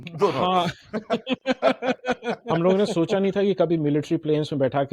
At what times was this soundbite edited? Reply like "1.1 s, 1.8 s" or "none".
2.4 s

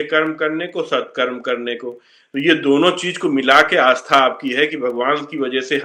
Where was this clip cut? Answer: none

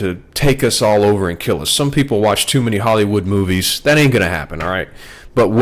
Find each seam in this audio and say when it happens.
none

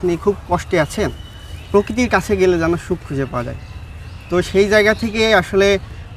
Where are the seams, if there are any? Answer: none

